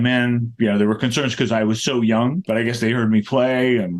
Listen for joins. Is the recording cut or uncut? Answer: uncut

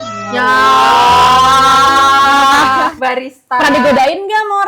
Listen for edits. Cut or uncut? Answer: cut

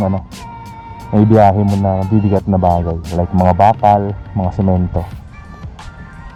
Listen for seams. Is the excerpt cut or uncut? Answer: uncut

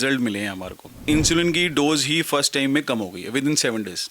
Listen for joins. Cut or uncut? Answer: cut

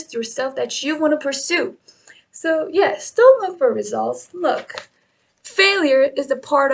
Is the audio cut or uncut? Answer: uncut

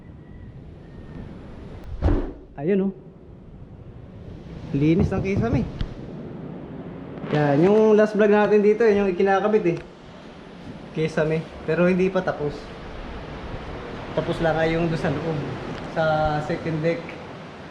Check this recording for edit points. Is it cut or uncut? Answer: cut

